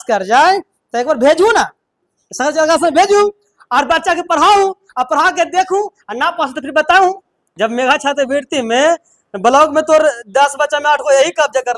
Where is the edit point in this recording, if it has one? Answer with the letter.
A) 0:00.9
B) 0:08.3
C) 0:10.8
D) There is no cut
D